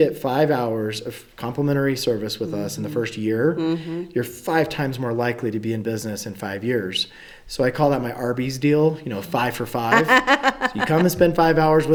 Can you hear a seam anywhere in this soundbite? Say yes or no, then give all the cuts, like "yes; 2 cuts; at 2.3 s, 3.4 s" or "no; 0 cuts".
no; 0 cuts